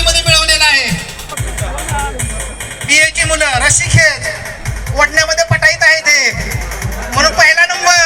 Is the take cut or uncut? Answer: cut